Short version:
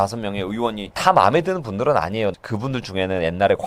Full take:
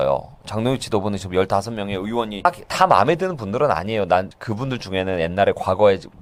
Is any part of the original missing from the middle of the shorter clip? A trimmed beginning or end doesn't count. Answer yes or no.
yes